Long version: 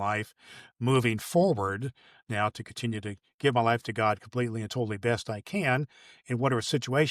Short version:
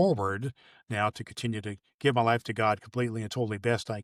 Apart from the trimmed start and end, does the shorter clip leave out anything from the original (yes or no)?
no